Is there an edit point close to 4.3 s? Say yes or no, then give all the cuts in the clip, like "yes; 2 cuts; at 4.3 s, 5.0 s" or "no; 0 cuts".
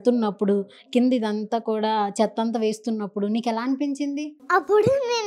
yes; 1 cut; at 4.3 s